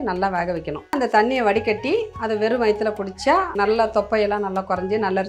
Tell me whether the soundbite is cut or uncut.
cut